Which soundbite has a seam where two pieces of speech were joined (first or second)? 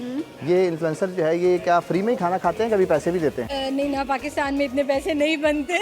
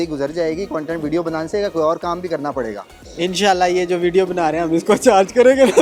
first